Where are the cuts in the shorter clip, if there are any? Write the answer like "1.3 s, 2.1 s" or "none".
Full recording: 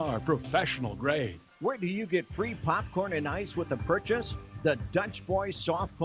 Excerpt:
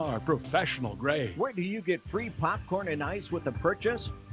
1.3 s

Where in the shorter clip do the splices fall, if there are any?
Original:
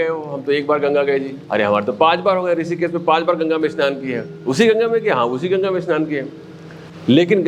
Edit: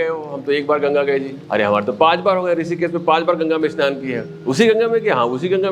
none

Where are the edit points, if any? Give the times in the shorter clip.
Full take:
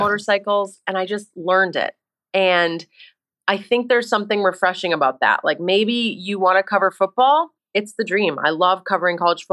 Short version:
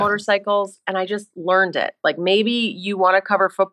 2.0 s

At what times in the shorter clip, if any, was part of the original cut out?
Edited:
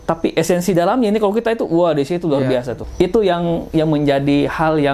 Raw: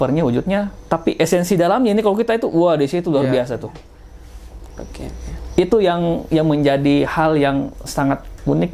2.8 s

